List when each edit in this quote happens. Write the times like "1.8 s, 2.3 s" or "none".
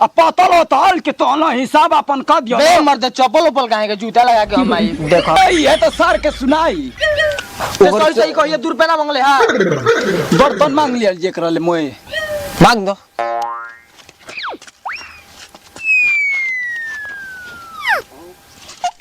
5.4 s